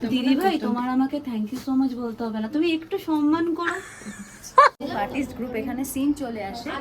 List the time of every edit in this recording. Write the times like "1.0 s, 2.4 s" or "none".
4.8 s